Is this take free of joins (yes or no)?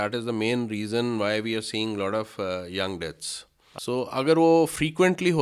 no